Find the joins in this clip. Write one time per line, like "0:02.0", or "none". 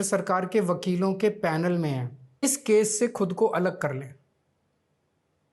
0:02.4